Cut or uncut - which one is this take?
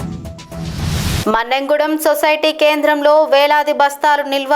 cut